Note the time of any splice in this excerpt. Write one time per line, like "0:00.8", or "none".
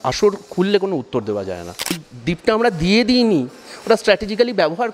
0:02.1